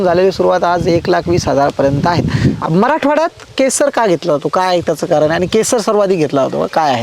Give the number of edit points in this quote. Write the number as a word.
one